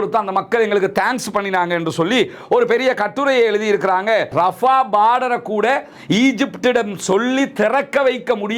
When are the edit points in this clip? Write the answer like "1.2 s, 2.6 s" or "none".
4.3 s

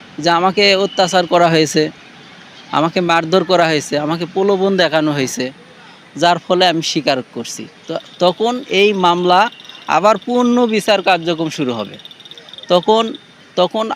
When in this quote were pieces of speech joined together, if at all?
none

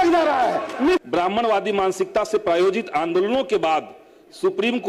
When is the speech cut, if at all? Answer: 1.0 s

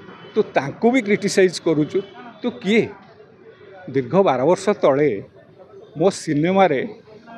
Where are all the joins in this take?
none

